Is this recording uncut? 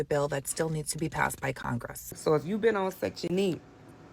no; 1 cut; at 2.1 s

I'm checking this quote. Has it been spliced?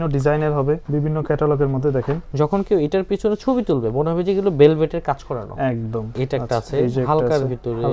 yes; 3 cuts; at 0.8 s, 2.2 s, 6.1 s

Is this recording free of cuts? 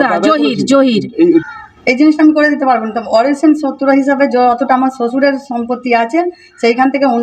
no; 1 cut; at 1.4 s

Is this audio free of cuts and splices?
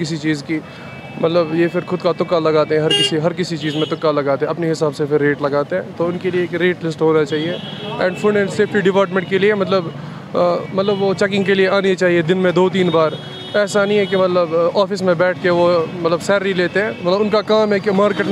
yes; 0 cuts

